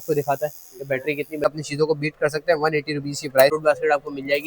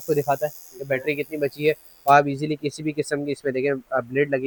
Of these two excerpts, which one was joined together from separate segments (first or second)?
first